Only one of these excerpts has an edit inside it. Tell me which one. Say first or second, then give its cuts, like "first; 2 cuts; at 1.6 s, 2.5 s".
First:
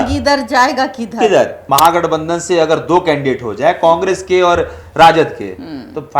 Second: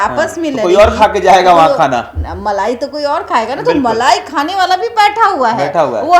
first; 1 cut; at 1.6 s